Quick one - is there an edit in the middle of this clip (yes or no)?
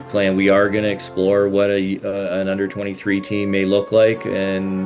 no